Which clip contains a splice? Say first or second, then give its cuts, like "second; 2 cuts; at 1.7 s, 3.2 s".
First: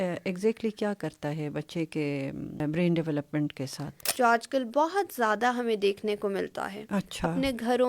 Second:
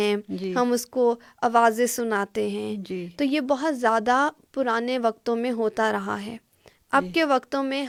first; 2 cuts; at 2.6 s, 4.0 s